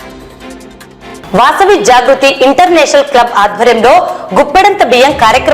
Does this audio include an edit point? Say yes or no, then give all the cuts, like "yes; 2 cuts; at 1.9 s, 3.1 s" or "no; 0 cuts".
yes; 1 cut; at 1.1 s